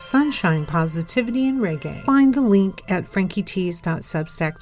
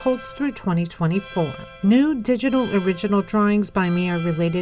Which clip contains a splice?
first; 1 cut; at 2.0 s

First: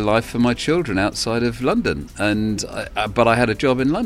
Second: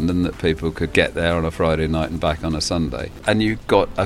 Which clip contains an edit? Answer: second; 2 cuts; at 0.9 s, 3.2 s

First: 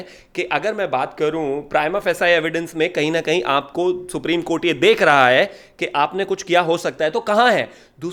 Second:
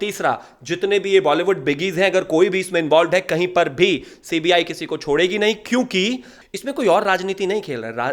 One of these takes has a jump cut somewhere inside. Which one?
second; 1 cut; at 6.3 s

